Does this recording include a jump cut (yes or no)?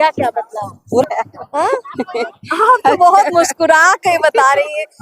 yes